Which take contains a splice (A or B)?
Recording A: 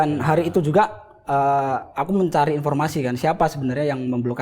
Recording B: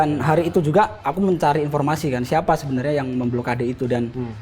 B